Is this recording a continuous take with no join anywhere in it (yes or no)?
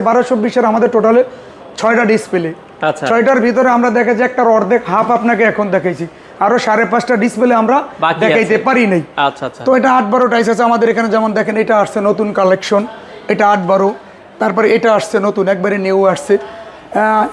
yes